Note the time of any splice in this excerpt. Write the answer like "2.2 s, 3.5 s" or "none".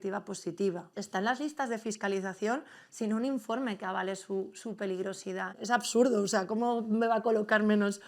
0.9 s, 5.5 s